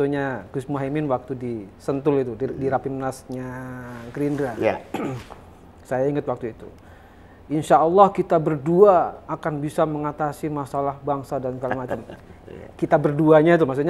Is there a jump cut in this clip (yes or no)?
no